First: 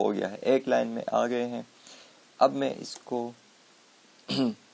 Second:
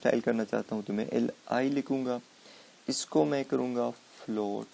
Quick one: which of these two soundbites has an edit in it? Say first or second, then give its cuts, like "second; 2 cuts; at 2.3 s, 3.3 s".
second; 1 cut; at 1.0 s